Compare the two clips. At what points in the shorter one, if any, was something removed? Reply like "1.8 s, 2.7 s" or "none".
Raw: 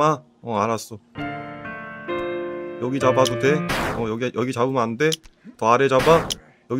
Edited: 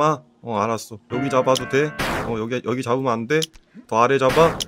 1.0 s